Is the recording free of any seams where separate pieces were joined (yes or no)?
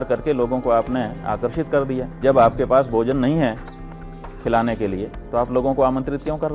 no